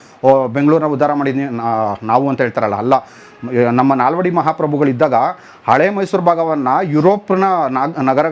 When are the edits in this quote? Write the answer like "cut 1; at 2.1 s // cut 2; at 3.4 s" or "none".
none